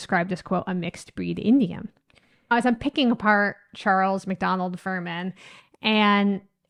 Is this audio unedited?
yes; 0 cuts

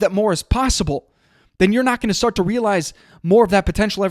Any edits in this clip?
no; 0 cuts

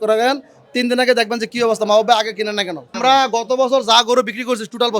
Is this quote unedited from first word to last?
no; 1 cut; at 2.9 s

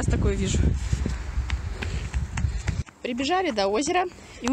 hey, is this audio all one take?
no; 1 cut; at 2.9 s

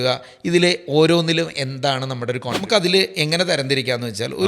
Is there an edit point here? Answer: yes; 1 cut; at 2.6 s

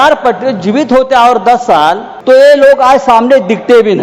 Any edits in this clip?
yes; 1 cut; at 2.1 s

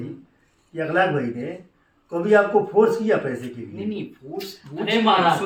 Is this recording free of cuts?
yes; 0 cuts

